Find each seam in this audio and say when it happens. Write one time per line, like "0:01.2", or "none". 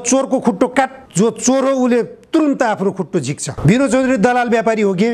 0:01.0
0:03.4